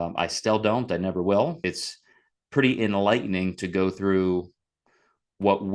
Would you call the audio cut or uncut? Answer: cut